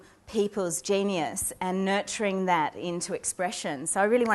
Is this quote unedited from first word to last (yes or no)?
yes